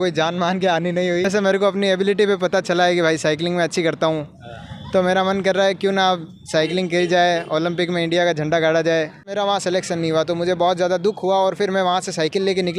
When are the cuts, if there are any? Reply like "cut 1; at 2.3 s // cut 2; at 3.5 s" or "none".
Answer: cut 1; at 1.3 s // cut 2; at 9.3 s